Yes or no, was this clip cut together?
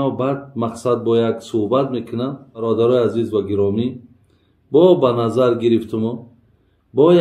yes